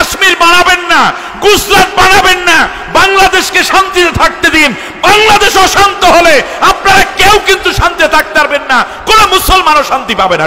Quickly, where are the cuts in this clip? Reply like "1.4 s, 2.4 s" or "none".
none